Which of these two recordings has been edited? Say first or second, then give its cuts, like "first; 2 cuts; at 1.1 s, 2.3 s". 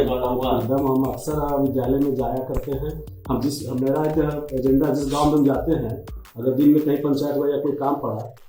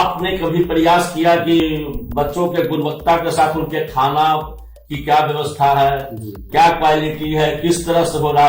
second; 1 cut; at 1.6 s